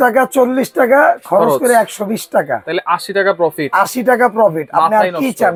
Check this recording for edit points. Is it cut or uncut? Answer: uncut